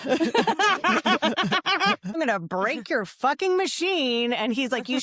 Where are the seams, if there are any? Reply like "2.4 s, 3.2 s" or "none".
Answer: 2.2 s